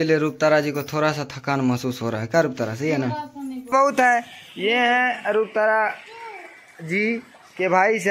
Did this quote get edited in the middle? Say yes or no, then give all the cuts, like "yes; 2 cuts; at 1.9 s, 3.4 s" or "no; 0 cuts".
yes; 1 cut; at 3.7 s